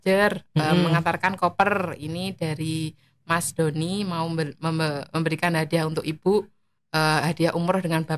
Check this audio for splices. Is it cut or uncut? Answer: uncut